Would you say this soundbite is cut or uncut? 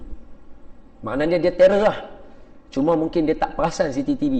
uncut